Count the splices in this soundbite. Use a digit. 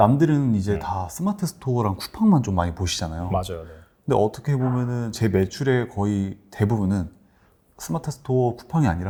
0